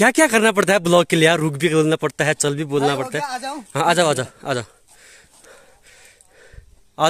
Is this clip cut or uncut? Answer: uncut